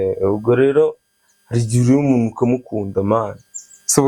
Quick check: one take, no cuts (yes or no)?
yes